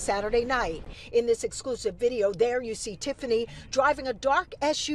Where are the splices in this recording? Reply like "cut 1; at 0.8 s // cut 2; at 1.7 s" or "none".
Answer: cut 1; at 2.1 s